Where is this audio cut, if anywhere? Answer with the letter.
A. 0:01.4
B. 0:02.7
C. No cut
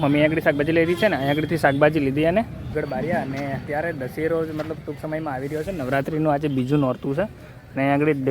B